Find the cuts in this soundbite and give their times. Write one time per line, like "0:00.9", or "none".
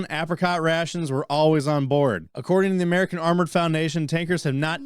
0:02.3